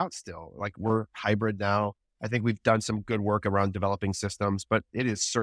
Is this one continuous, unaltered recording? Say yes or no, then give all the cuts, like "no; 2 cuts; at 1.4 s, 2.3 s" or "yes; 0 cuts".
yes; 0 cuts